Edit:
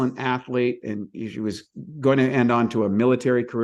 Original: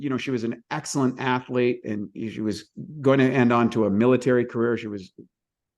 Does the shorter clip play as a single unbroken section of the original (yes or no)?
yes